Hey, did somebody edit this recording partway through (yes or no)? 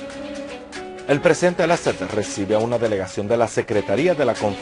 yes